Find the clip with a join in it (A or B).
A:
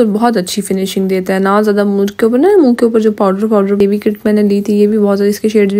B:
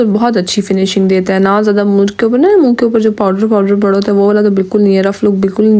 A